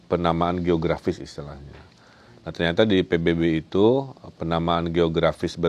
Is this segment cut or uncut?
uncut